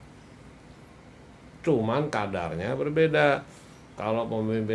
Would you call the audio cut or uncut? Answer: uncut